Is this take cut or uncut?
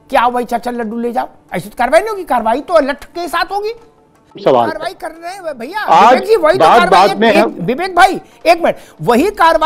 cut